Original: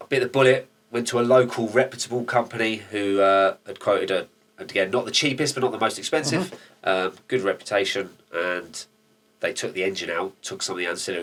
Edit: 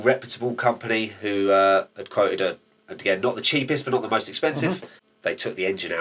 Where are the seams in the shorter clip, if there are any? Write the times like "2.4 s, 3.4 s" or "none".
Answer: 4.9 s